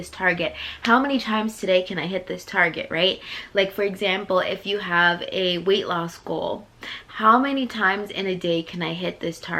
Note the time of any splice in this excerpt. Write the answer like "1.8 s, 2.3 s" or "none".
none